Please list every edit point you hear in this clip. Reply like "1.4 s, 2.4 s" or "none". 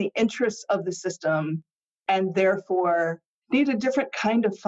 3.3 s